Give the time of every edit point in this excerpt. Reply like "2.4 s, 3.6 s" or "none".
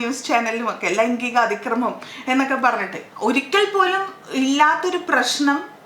3.0 s